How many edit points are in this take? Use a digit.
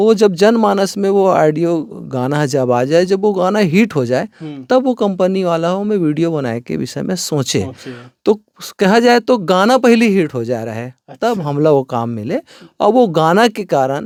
0